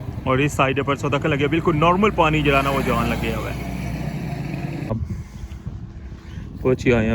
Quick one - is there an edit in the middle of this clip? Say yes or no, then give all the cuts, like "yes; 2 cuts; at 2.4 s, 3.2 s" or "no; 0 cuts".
yes; 1 cut; at 4.9 s